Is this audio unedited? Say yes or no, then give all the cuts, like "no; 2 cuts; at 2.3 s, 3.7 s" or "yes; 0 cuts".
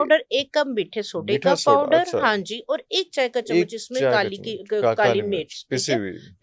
yes; 0 cuts